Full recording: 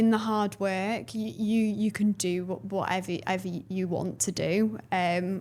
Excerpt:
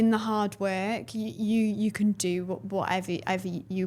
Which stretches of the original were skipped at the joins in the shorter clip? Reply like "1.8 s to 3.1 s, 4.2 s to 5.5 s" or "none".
none